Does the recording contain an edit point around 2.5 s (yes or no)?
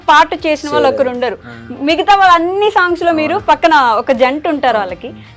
no